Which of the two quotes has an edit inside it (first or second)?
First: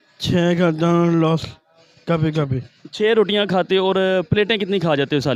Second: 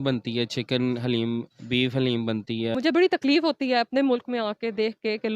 second